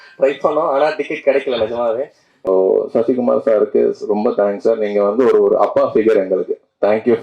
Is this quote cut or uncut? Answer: cut